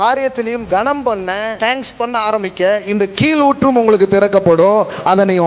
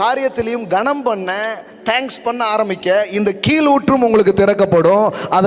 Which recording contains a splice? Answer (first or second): first